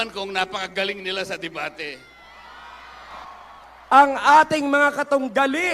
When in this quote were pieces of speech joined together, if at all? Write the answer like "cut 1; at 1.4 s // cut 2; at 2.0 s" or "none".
cut 1; at 3.2 s